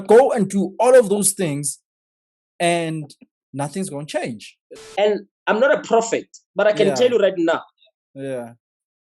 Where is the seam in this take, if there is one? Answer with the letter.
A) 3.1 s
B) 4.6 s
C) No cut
B